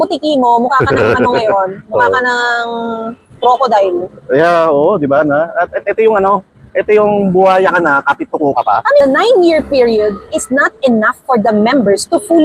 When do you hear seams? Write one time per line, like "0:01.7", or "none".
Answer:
0:09.0